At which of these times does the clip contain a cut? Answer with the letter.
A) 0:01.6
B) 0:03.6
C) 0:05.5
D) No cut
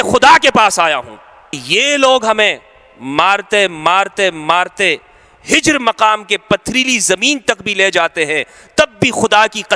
A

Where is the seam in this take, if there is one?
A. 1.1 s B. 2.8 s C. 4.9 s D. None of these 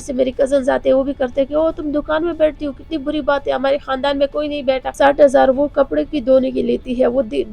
C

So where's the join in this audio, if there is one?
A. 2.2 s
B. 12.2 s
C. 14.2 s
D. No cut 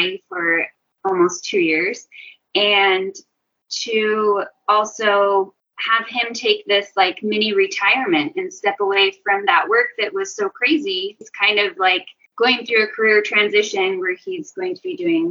B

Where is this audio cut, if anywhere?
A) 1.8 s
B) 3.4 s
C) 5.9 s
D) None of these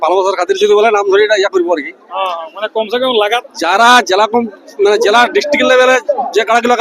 B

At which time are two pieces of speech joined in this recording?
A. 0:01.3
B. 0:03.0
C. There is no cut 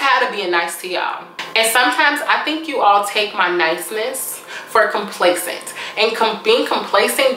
A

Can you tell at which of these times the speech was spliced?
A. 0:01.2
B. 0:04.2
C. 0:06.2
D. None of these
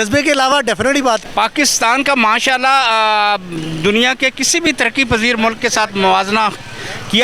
A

